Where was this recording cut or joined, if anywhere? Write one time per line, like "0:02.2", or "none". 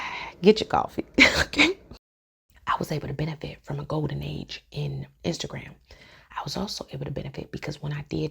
0:02.1
0:05.1